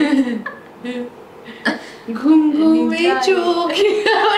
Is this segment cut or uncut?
uncut